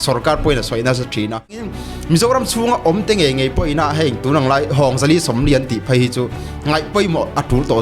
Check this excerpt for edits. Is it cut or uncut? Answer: cut